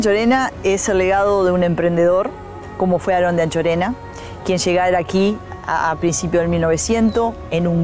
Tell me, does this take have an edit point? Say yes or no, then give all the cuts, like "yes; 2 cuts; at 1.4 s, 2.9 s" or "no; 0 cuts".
no; 0 cuts